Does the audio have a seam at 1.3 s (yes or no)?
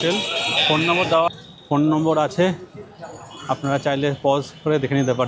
yes